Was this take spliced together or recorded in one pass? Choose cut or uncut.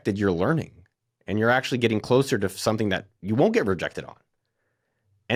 uncut